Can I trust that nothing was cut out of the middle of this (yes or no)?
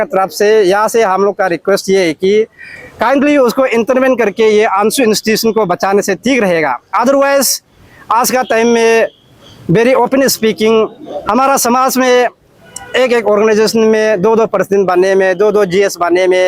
yes